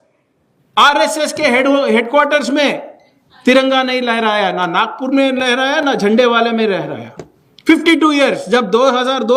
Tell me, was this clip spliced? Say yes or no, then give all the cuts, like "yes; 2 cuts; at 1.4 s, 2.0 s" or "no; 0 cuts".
no; 0 cuts